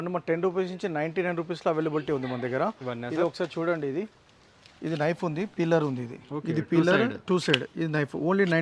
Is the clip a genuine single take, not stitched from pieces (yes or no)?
yes